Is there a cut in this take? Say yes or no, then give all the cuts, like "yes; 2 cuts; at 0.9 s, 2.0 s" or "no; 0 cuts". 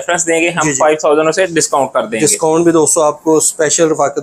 no; 0 cuts